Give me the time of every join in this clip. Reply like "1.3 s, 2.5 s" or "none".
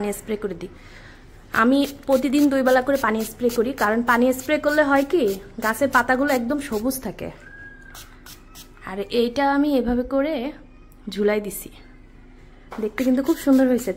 none